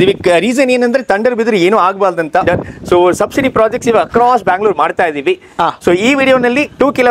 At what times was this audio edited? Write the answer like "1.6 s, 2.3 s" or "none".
2.4 s